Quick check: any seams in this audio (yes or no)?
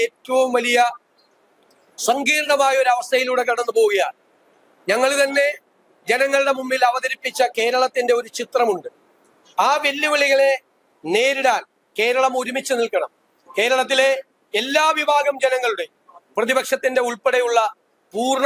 no